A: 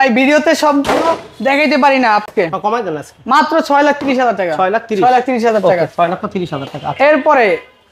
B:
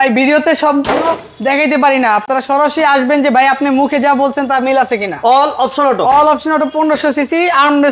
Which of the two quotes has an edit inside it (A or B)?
A